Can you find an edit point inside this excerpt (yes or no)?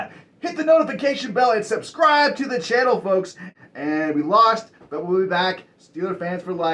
yes